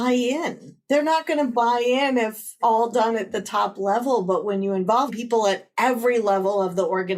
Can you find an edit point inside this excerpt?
yes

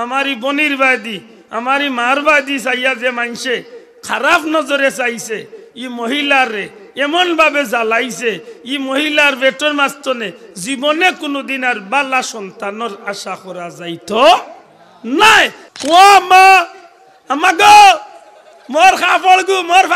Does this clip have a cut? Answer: yes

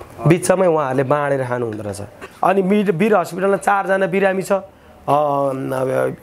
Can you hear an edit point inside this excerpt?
yes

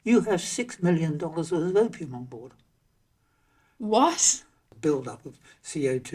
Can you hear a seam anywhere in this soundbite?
yes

